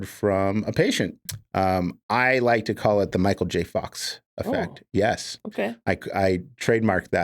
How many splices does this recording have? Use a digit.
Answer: 1